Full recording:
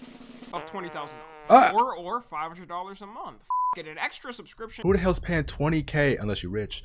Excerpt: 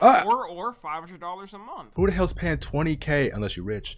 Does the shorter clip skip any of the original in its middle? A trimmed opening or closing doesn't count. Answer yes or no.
yes